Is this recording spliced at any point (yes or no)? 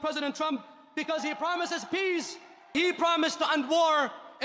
no